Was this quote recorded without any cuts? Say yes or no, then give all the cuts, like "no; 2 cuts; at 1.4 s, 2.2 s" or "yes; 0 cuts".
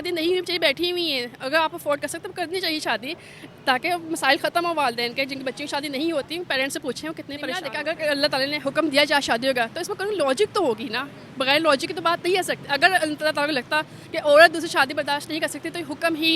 no; 1 cut; at 7.7 s